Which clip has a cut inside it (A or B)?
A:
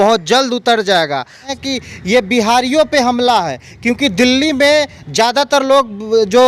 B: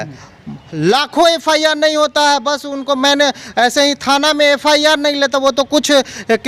A